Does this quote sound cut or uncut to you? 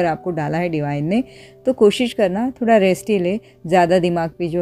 uncut